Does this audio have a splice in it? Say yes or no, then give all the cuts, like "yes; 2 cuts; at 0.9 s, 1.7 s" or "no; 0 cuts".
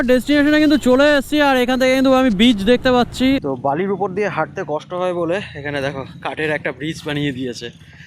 yes; 1 cut; at 3.4 s